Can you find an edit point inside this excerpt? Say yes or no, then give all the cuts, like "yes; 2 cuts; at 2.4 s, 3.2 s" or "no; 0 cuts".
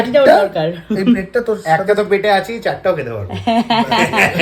no; 0 cuts